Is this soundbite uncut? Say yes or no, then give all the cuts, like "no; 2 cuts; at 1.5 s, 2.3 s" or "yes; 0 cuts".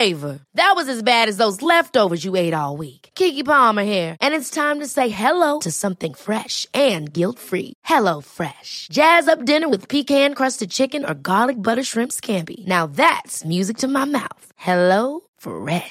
yes; 0 cuts